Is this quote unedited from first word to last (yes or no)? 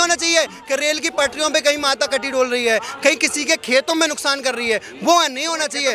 yes